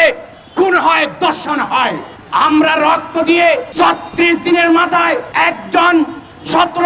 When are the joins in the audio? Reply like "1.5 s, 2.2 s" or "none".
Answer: 2.1 s, 3.7 s, 5.3 s